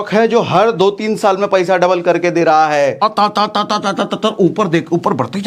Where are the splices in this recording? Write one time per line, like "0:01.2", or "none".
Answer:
0:03.0